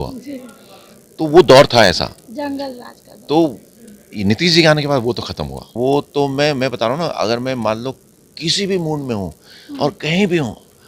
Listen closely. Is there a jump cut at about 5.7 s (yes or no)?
yes